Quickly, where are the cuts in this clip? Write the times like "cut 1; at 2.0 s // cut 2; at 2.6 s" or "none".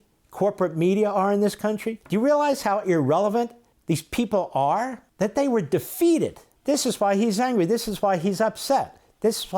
cut 1; at 1.9 s // cut 2; at 3.7 s // cut 3; at 5.0 s // cut 4; at 6.5 s